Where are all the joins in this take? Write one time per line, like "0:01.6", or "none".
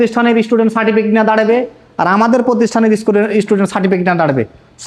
none